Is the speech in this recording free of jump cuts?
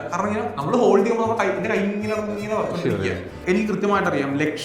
no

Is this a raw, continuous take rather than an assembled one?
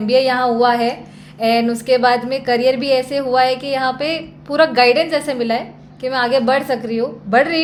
yes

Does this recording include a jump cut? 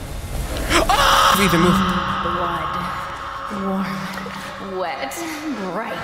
yes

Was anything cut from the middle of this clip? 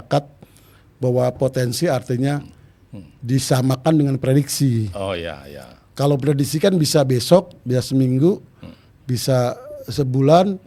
no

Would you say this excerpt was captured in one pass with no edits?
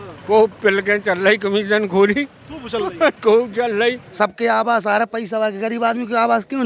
no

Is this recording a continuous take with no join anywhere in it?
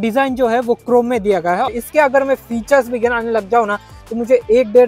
no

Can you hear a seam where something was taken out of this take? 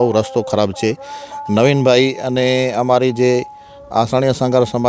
no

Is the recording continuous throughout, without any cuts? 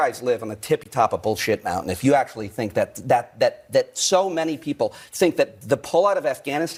yes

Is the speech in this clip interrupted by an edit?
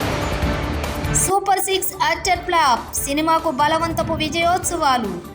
yes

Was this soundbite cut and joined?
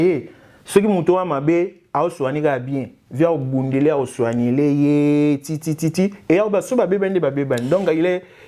no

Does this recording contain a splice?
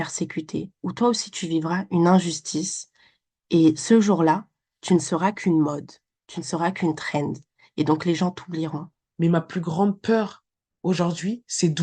yes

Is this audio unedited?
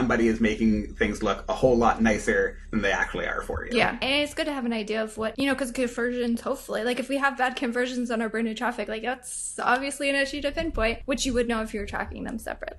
yes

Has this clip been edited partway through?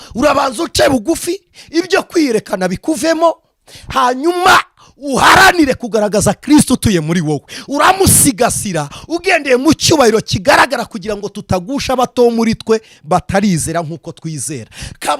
no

